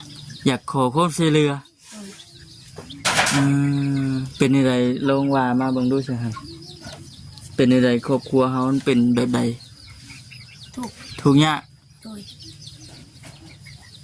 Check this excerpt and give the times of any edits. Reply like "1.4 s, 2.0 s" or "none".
none